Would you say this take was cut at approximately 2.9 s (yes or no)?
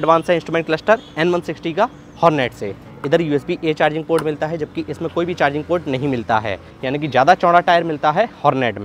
yes